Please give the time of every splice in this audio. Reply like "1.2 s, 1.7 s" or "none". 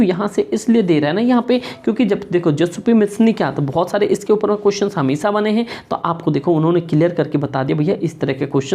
none